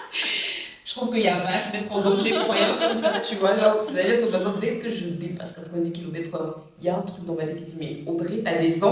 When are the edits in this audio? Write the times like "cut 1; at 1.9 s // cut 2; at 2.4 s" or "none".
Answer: none